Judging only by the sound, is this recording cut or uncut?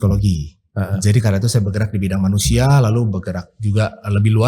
uncut